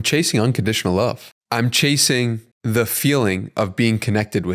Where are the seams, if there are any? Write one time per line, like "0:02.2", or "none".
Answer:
0:01.3
0:02.5